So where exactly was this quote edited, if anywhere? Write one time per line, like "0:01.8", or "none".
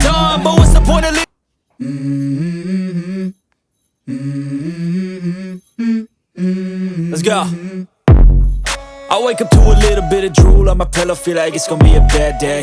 0:01.2